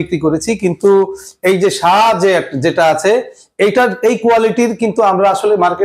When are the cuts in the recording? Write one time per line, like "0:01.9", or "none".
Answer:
none